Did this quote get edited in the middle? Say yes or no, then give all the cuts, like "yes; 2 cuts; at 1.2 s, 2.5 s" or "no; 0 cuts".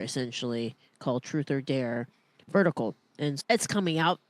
yes; 1 cut; at 3.4 s